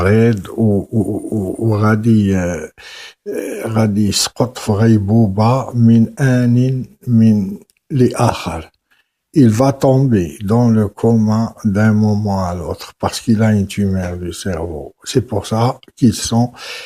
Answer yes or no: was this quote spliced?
no